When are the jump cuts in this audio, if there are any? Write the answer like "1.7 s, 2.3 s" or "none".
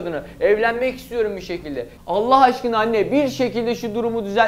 none